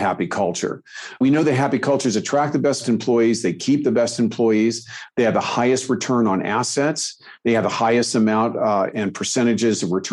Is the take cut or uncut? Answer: cut